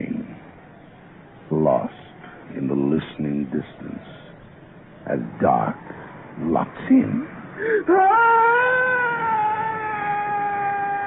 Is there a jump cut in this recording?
no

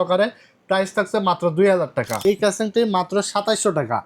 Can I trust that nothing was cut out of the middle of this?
no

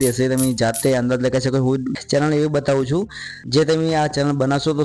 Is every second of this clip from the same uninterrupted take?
no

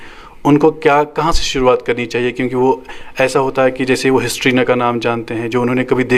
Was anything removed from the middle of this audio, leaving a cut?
no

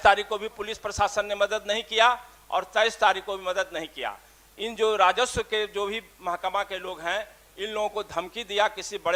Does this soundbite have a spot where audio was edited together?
no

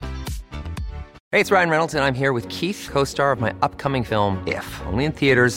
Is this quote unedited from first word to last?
no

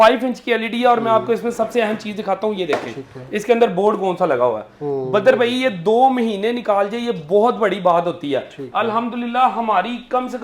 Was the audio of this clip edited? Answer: yes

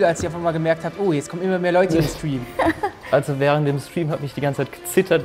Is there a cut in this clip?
no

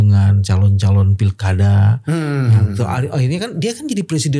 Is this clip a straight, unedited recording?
yes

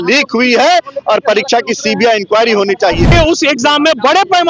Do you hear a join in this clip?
yes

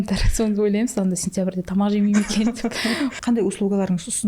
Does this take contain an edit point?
yes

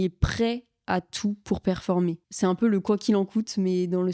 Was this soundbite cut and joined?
yes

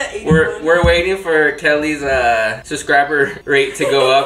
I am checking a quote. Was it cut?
yes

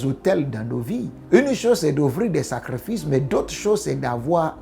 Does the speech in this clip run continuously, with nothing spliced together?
no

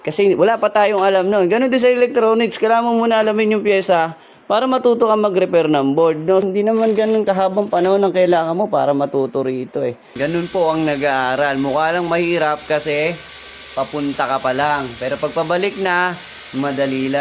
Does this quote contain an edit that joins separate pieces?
yes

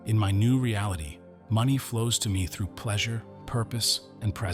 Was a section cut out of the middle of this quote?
no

